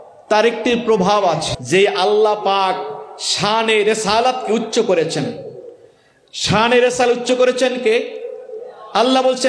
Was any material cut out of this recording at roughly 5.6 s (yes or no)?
no